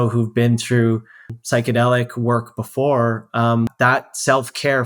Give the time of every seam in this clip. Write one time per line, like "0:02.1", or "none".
0:01.3
0:03.7